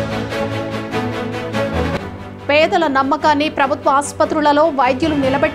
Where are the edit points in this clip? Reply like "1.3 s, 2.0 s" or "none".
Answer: 1.9 s